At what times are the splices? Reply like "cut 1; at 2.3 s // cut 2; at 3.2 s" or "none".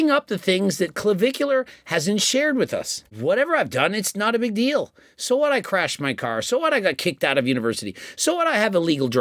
cut 1; at 3.0 s